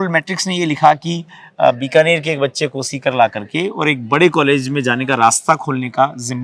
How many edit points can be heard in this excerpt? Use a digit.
0